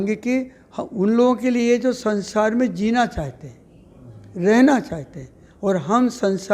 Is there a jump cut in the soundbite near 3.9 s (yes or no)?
no